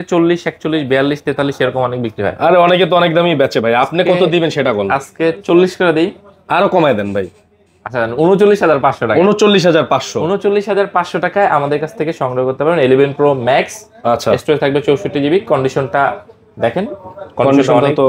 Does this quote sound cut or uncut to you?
uncut